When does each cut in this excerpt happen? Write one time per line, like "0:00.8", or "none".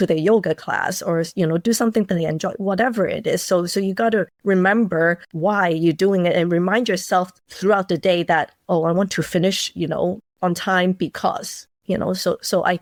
none